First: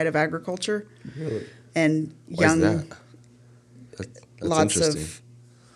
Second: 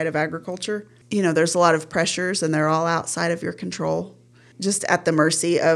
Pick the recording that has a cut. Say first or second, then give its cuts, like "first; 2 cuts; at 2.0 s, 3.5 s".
second; 2 cuts; at 0.9 s, 4.5 s